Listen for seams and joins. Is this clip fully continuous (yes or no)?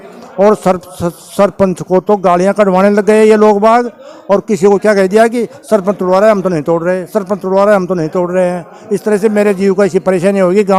yes